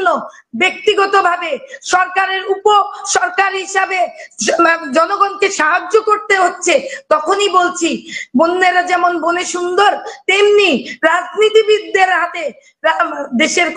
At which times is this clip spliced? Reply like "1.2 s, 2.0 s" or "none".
none